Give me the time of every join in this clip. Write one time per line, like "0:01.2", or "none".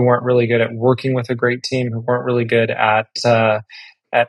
none